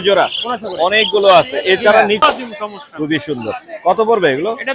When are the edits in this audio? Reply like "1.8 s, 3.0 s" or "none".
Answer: 2.2 s

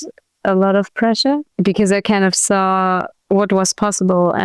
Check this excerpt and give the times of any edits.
1.5 s, 3.1 s

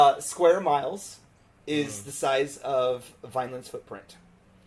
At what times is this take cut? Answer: none

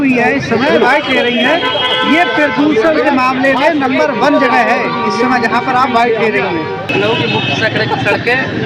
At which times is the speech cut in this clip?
6.9 s

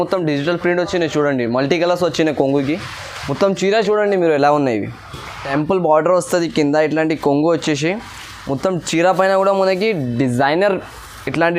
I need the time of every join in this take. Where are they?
5.4 s

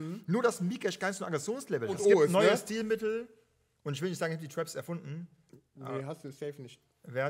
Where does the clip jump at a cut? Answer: 2.0 s

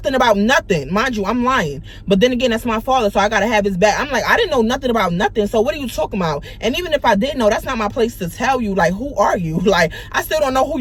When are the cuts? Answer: none

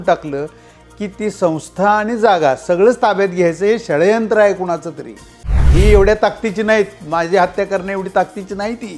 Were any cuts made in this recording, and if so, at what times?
5.6 s

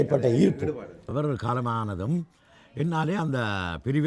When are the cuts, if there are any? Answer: 1.0 s

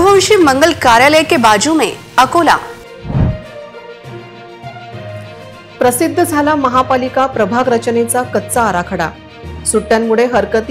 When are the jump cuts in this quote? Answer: none

